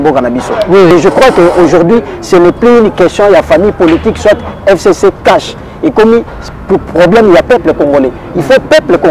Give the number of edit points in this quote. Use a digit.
1